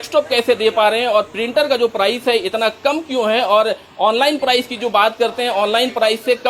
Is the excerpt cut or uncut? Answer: uncut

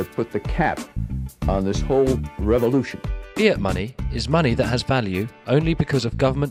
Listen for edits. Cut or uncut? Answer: uncut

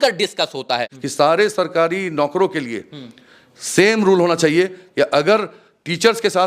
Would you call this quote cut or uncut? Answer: cut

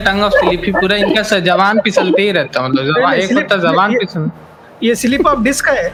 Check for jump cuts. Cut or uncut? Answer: uncut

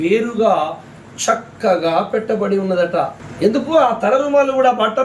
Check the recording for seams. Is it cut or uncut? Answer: cut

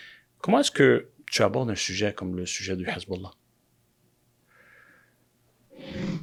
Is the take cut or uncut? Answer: uncut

